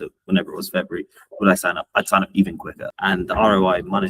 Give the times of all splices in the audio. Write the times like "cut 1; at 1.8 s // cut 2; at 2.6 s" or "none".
cut 1; at 2.8 s